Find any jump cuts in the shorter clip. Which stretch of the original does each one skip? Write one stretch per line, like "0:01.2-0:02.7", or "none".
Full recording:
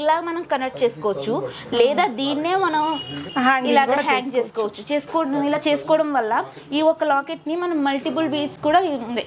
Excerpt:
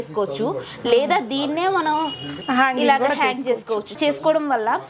0:04.8-0:05.6